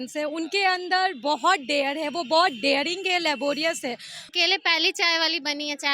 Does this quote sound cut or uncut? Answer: cut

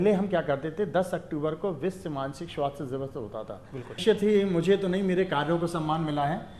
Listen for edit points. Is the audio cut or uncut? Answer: cut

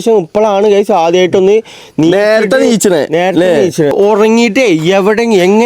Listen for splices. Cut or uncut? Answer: cut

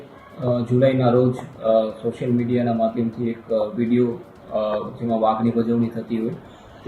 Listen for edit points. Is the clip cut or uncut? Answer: uncut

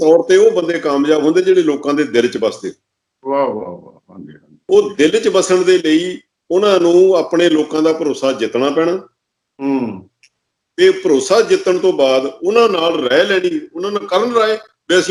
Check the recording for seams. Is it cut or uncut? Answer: uncut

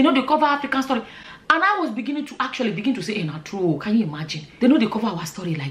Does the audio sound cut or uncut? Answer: uncut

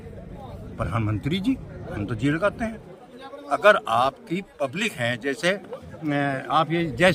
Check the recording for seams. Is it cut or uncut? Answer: uncut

